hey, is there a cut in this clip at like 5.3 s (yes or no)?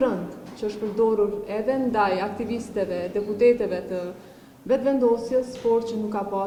no